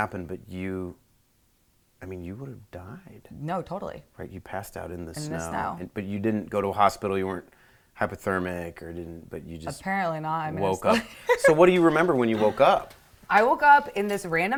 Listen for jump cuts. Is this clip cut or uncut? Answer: uncut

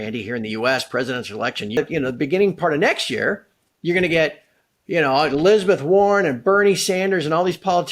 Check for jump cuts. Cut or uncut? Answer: cut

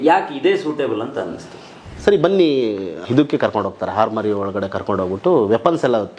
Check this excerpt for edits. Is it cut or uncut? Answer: cut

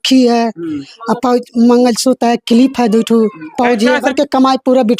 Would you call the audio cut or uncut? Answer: cut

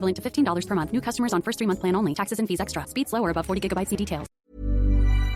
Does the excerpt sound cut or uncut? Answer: cut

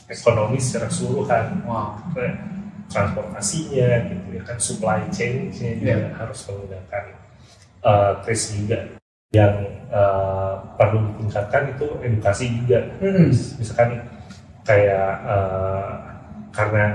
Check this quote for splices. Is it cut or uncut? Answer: cut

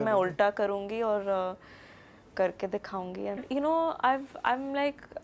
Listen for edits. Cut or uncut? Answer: cut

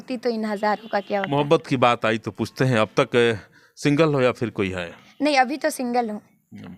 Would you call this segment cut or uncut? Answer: uncut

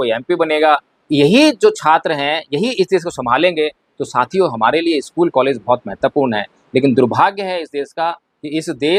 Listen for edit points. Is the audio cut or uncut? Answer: uncut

